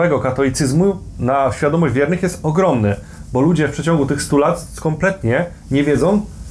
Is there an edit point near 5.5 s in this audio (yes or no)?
no